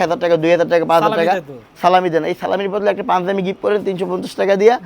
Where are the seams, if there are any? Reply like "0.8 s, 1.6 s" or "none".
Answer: none